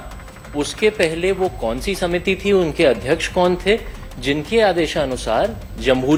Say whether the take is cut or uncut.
uncut